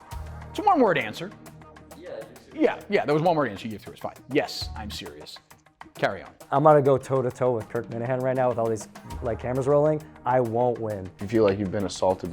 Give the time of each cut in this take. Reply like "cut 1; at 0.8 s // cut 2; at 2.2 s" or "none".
cut 1; at 11.1 s